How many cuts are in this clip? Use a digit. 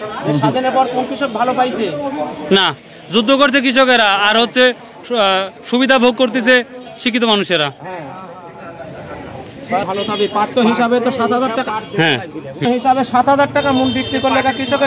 0